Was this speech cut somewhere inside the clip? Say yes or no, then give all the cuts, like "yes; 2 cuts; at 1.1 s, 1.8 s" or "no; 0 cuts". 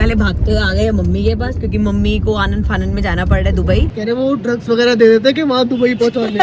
yes; 1 cut; at 3.9 s